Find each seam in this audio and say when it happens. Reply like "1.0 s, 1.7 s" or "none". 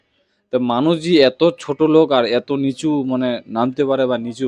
none